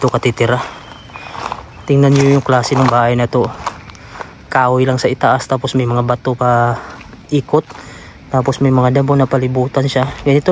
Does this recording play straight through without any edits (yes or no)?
yes